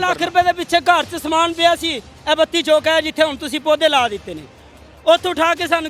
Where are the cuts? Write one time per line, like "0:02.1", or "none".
none